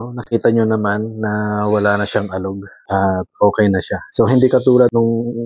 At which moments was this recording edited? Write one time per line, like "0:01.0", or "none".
none